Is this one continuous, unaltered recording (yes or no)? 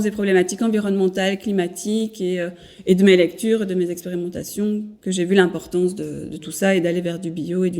no